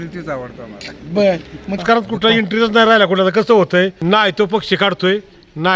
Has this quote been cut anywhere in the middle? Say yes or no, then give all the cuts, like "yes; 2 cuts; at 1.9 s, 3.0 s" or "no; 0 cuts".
yes; 2 cuts; at 1.8 s, 4.0 s